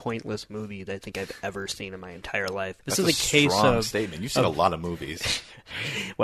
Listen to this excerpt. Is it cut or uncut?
cut